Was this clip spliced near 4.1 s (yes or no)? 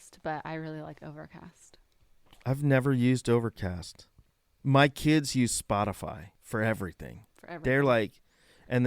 no